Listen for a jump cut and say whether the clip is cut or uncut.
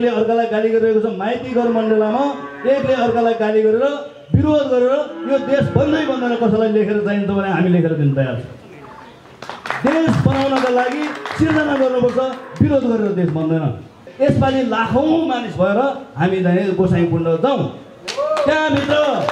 cut